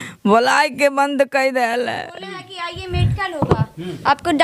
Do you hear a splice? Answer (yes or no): no